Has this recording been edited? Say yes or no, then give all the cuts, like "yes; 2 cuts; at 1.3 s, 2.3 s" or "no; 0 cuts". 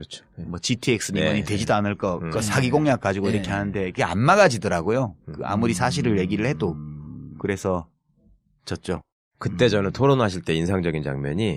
no; 0 cuts